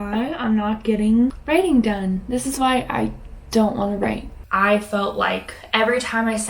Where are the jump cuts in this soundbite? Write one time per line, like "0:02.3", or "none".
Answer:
0:04.3